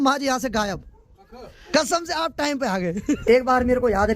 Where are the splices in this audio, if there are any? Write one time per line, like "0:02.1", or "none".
0:01.5
0:03.2